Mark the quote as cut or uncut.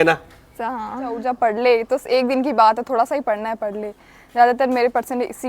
cut